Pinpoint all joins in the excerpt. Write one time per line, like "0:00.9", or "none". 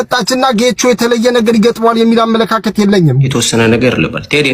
0:03.3